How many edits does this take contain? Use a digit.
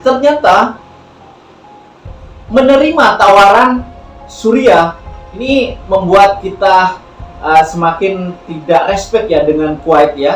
1